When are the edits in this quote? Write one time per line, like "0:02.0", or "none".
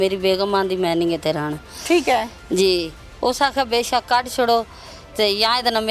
none